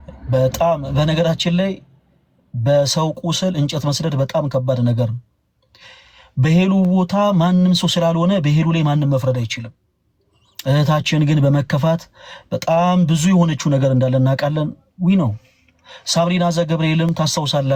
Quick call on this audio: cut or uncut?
uncut